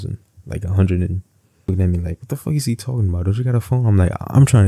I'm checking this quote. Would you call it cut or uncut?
cut